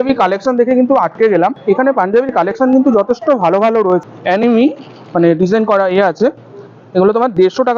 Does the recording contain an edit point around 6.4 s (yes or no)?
no